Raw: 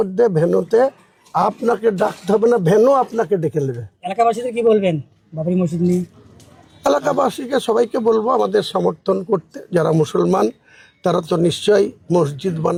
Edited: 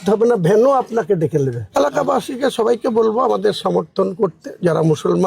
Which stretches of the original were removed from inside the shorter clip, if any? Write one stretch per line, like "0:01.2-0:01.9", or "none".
0:03.8-0:06.7

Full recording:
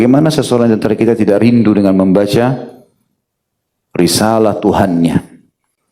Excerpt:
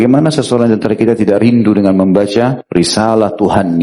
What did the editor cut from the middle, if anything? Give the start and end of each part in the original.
0:02.6-0:03.9

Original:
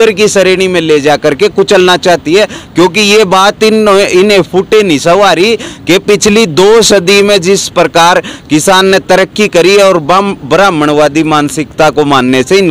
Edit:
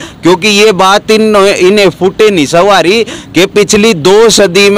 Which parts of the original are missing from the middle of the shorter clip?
none

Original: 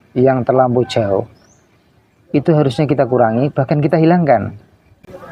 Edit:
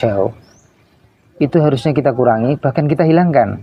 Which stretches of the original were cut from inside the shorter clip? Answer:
none

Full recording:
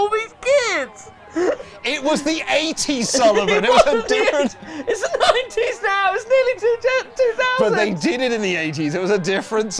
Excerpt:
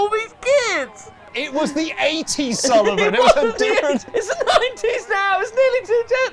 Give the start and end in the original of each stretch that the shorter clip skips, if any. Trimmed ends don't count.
0:01.2-0:01.7
0:04.6-0:04.8

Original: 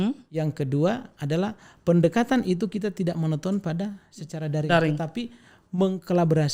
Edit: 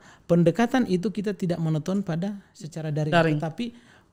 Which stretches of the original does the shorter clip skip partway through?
none

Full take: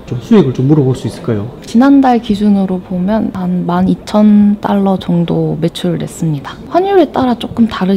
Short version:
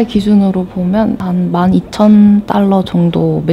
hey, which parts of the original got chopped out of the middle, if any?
none

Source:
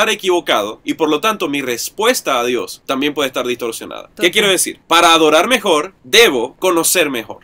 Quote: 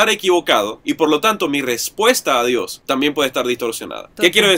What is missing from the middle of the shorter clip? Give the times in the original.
none

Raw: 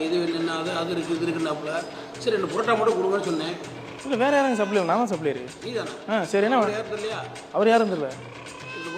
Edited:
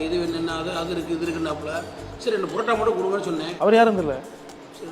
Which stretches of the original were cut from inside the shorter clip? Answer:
0:03.5-0:07.4

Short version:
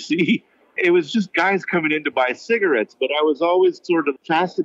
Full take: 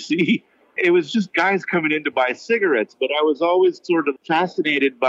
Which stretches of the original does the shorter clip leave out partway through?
none

